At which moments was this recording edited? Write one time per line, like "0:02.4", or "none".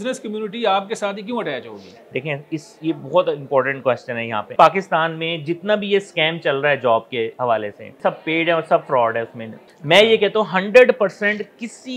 0:04.5
0:08.0
0:09.6